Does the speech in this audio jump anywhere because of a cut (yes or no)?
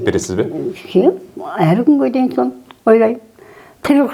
no